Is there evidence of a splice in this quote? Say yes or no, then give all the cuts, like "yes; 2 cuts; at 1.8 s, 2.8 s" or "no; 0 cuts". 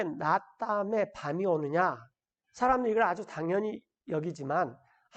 no; 0 cuts